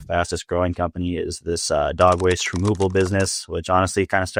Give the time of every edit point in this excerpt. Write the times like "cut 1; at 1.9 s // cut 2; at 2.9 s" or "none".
none